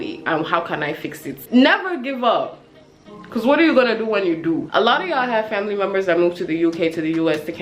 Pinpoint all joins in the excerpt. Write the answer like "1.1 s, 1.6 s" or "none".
1.3 s, 4.6 s